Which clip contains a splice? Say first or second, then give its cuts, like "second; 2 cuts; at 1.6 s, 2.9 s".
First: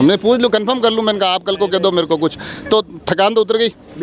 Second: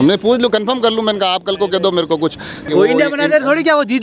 second; 1 cut; at 2.7 s